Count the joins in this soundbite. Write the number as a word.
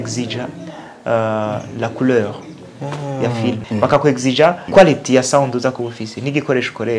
two